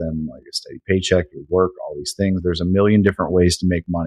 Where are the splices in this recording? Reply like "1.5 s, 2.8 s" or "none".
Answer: none